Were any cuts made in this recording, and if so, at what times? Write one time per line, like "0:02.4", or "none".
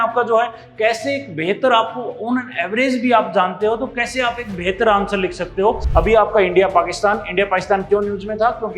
0:05.8